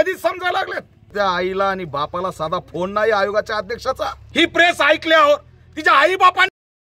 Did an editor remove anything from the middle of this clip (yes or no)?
yes